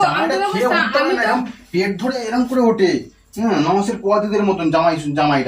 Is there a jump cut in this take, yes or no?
no